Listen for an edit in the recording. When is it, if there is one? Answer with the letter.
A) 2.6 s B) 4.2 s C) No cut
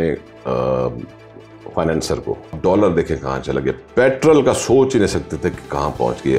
A